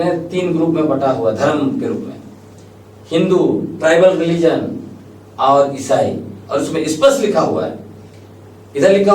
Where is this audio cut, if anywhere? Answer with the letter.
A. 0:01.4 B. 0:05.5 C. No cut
C